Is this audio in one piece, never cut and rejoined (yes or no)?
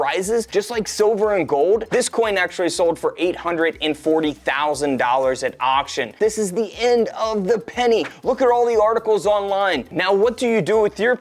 no